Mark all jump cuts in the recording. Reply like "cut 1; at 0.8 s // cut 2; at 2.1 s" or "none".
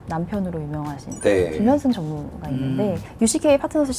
cut 1; at 3.1 s